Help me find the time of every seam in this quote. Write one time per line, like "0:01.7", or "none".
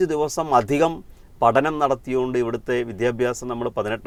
none